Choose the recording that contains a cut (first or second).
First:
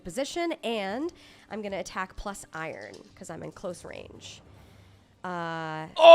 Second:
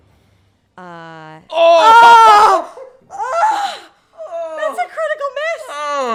first